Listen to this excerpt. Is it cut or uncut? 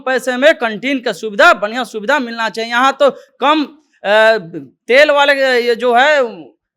uncut